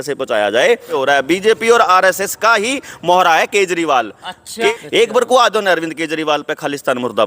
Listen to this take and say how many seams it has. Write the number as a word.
two